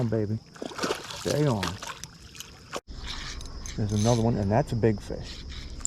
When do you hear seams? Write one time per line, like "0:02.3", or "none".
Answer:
0:02.8